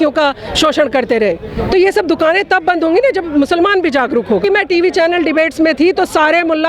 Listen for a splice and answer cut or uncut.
cut